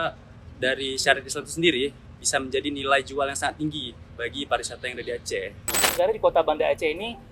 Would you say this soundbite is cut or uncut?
cut